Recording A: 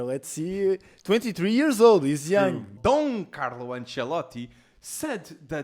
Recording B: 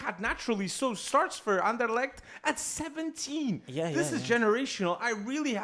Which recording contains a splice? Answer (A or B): A